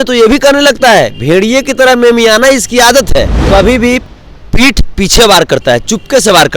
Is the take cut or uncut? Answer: cut